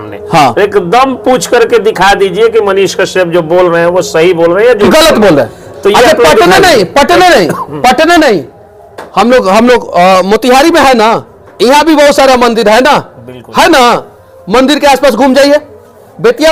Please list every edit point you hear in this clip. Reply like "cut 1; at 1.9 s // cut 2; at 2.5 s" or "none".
none